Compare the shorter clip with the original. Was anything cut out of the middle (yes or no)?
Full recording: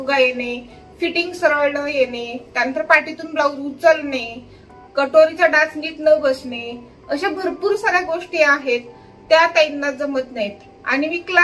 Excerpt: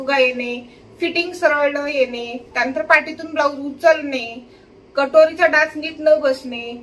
no